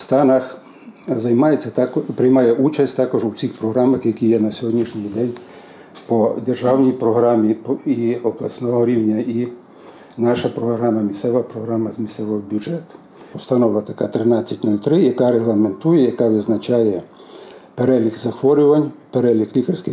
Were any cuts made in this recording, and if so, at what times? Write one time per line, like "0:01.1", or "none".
0:13.3